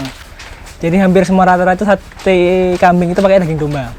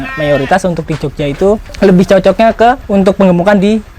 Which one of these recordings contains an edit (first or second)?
second